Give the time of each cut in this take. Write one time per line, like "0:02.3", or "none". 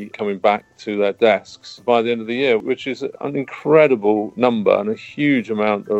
0:03.0